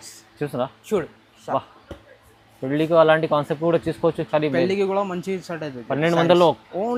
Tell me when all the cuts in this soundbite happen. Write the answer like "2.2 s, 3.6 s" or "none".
none